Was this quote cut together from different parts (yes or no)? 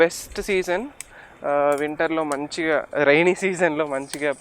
no